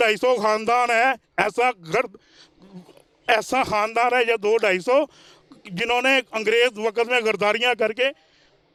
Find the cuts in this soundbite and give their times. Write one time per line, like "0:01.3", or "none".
none